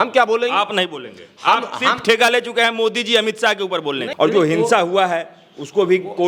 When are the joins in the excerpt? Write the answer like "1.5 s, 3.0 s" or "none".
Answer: 4.0 s